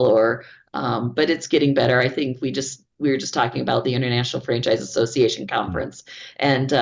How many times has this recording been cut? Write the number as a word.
zero